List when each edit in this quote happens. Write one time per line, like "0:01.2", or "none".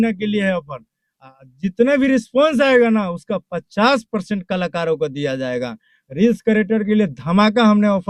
none